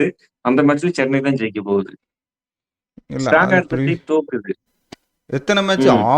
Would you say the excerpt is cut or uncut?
cut